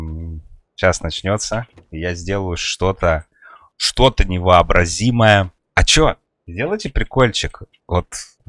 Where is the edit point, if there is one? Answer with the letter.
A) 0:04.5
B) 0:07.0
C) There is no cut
C